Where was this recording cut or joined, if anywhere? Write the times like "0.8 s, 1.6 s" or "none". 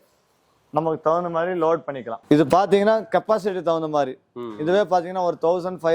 2.1 s